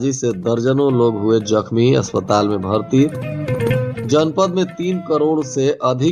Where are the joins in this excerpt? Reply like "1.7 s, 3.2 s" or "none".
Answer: none